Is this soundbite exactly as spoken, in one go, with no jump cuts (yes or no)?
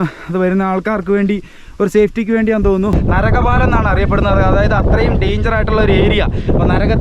no